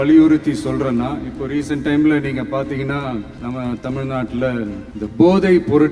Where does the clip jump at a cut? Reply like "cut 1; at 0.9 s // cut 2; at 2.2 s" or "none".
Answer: cut 1; at 3.3 s // cut 2; at 4.9 s